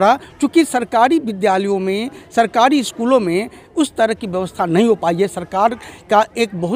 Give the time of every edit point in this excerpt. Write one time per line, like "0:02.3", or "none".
none

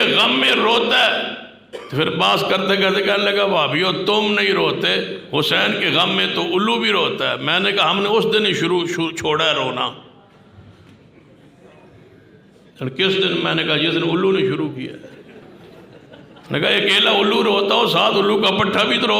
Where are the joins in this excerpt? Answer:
0:15.4

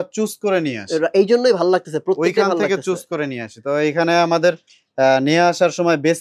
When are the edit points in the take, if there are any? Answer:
none

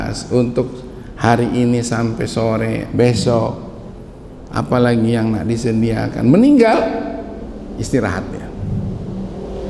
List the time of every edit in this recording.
none

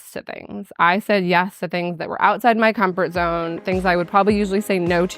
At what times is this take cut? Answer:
none

